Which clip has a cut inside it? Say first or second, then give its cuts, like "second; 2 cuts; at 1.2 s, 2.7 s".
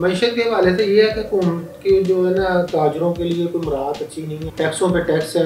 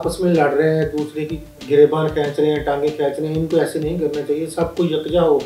first; 1 cut; at 4.4 s